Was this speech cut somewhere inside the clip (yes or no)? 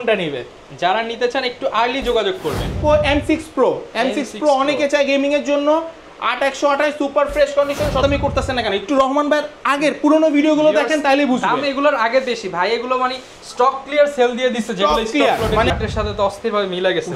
yes